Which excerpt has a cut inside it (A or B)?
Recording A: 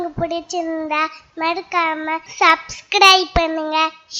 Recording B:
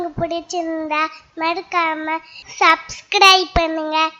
A